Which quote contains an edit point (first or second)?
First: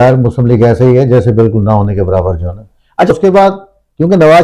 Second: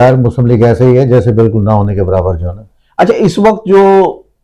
first